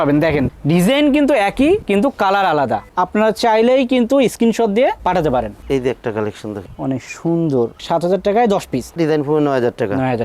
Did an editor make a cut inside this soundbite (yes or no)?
no